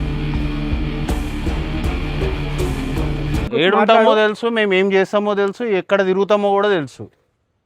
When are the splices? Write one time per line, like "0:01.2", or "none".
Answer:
0:03.5